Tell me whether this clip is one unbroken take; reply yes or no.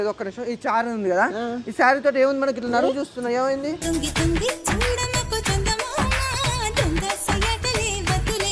yes